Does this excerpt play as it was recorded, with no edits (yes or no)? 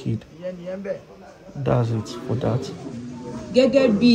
yes